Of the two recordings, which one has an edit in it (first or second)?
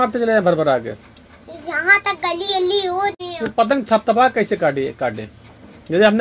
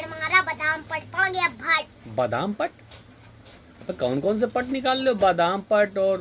first